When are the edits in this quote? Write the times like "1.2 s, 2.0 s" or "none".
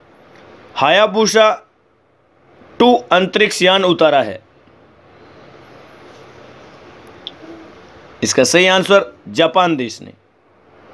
5.0 s